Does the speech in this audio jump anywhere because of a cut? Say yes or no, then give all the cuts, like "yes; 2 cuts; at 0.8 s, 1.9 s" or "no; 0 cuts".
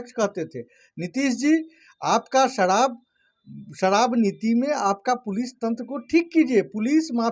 no; 0 cuts